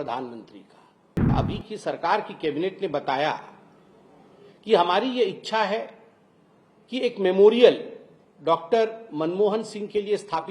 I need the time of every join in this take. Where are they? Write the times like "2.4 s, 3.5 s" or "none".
1.3 s